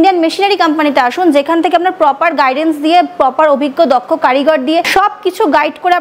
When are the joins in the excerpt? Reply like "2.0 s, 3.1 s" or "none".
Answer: 4.9 s